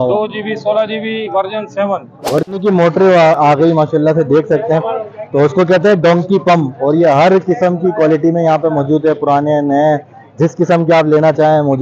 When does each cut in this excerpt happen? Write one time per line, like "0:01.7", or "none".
0:02.4